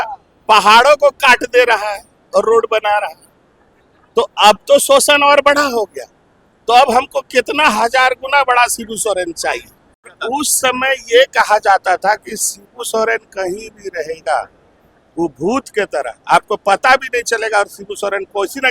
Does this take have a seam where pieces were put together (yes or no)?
yes